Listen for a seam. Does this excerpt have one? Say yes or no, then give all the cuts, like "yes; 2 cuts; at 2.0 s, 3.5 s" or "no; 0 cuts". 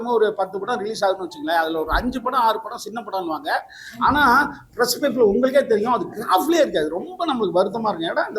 no; 0 cuts